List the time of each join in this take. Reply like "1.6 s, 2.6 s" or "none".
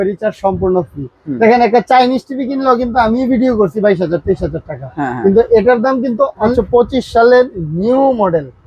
6.5 s